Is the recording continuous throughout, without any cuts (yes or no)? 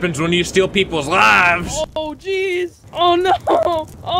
yes